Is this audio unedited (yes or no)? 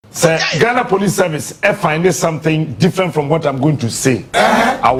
yes